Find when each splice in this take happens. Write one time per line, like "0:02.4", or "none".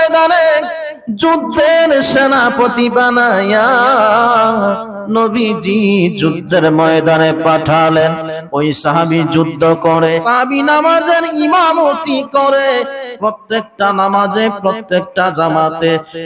0:10.2